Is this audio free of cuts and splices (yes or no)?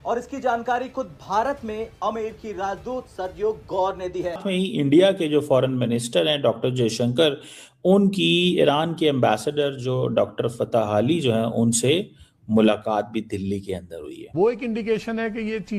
no